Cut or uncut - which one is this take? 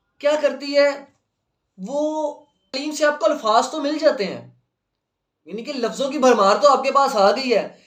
cut